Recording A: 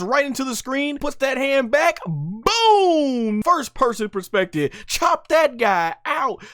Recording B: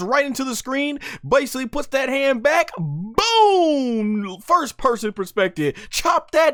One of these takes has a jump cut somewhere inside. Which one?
A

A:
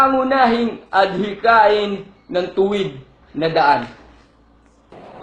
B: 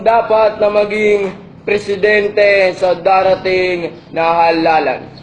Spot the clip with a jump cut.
B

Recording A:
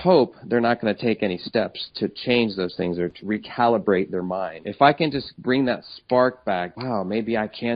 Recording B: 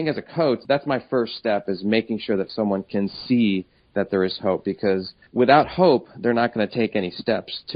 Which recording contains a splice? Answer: A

